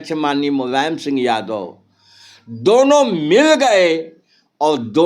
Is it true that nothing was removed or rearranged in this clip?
yes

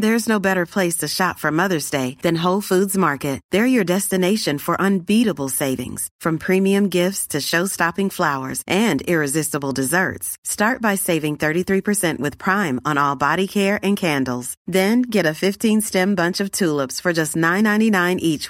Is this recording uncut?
yes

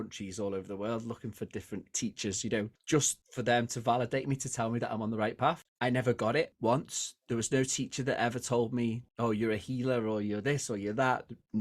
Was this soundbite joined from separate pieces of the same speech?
yes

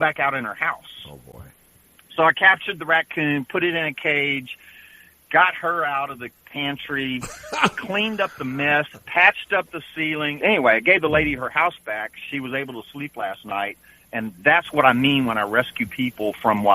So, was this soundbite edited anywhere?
yes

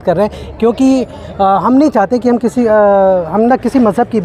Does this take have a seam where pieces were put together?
no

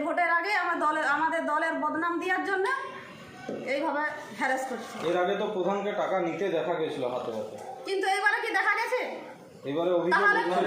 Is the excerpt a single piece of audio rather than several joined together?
yes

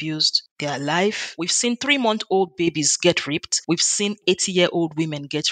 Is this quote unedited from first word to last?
no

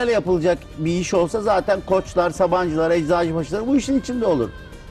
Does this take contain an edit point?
no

